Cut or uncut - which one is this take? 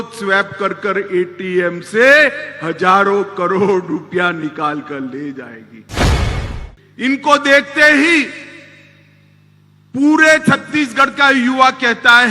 cut